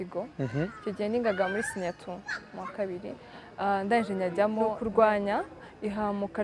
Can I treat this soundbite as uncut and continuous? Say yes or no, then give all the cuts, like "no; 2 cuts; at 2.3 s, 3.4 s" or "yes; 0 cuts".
no; 1 cut; at 4.8 s